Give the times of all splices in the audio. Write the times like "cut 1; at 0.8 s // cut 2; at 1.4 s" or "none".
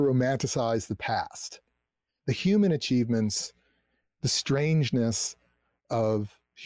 none

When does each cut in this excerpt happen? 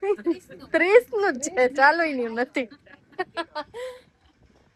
none

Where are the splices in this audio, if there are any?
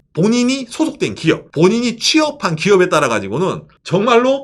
cut 1; at 1.5 s

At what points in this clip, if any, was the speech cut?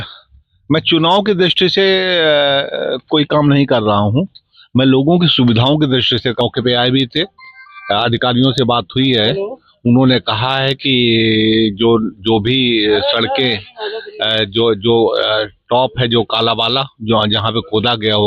cut 1; at 6.4 s

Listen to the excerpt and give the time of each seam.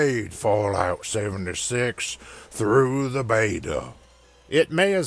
none

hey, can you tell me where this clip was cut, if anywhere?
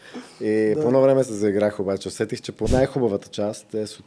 cut 1; at 2.6 s

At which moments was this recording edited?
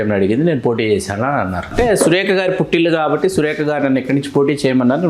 cut 1; at 1.7 s

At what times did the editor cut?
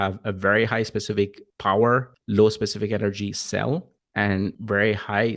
cut 1; at 1.5 s // cut 2; at 2.2 s // cut 3; at 4.4 s

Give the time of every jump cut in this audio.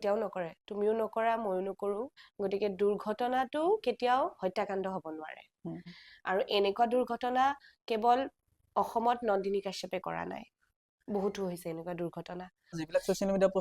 cut 1; at 2.2 s // cut 2; at 5.9 s // cut 3; at 12.8 s

